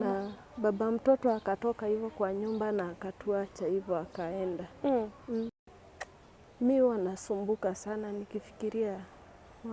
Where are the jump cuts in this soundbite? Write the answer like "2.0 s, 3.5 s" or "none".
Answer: 5.7 s